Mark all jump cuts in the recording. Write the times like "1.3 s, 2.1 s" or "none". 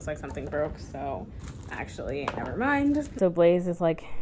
3.1 s

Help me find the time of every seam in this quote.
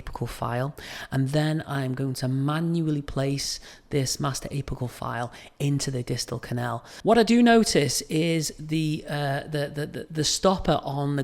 6.9 s

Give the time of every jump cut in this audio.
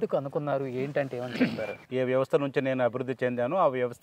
1.8 s

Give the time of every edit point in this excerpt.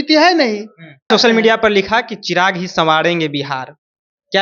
1.1 s

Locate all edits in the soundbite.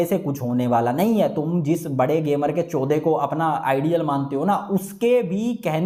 none

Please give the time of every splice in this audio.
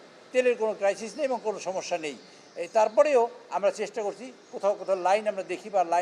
none

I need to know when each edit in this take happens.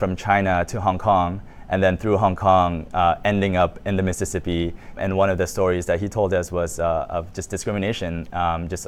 none

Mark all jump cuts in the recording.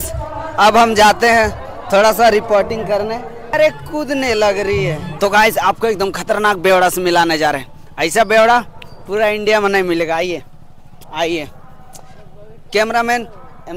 3.5 s, 5.1 s

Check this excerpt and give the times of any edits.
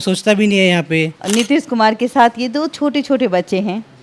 1.2 s

